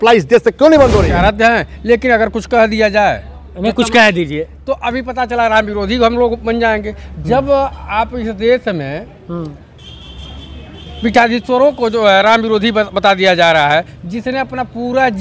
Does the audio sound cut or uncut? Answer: cut